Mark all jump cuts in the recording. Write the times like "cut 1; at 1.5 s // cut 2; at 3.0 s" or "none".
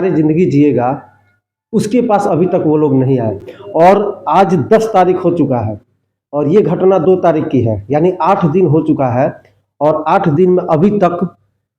none